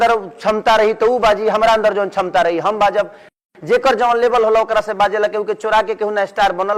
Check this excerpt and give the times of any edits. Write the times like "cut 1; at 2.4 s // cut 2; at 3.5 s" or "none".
none